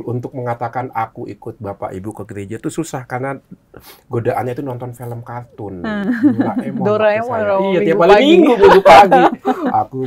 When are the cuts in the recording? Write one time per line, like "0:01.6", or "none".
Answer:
none